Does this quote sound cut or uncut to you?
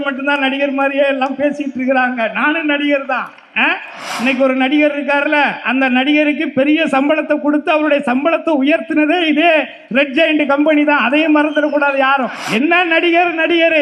cut